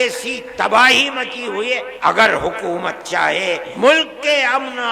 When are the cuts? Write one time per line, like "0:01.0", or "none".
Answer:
0:01.9
0:03.7